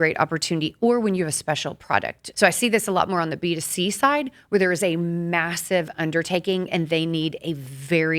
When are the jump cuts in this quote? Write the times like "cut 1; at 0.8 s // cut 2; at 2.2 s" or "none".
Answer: cut 1; at 2.2 s